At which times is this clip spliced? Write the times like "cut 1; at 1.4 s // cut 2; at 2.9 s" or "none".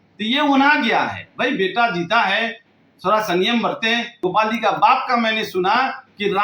cut 1; at 4.1 s